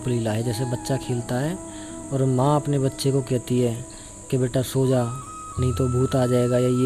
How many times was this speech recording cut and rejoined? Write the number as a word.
zero